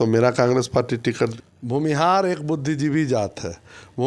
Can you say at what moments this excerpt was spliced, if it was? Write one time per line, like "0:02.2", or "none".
0:01.3